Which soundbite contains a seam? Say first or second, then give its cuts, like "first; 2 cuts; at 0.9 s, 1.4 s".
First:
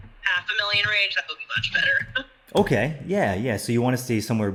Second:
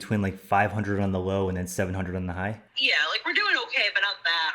second; 1 cut; at 2.7 s